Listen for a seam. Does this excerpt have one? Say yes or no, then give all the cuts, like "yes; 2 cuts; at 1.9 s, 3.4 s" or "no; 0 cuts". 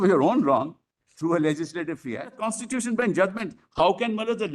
yes; 1 cut; at 2.5 s